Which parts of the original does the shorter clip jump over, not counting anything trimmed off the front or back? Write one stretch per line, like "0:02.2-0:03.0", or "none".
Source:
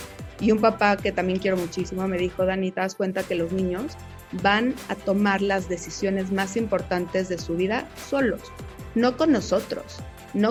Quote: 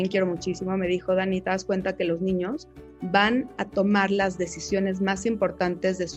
none